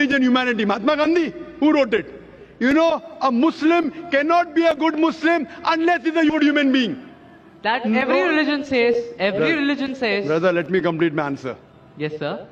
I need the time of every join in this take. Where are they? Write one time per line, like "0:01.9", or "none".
none